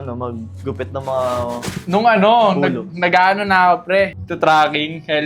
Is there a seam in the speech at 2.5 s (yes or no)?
no